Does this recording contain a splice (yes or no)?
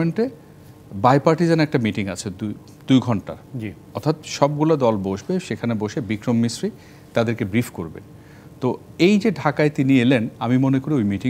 no